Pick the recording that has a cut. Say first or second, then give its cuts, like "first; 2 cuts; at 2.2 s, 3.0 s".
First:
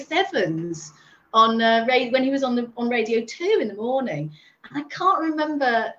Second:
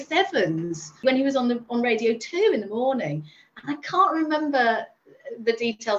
second; 1 cut; at 1.0 s